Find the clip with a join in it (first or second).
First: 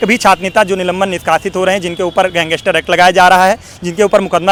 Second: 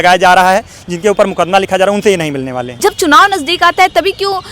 second